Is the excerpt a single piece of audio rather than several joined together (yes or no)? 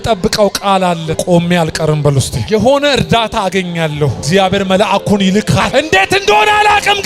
no